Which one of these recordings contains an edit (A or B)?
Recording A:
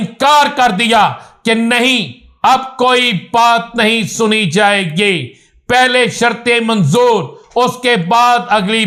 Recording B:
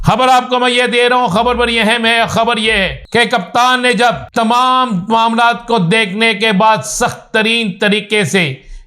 B